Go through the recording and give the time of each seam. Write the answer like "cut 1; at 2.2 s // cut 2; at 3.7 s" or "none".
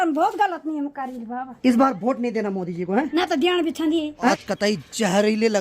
cut 1; at 1.5 s // cut 2; at 3.1 s // cut 3; at 4.3 s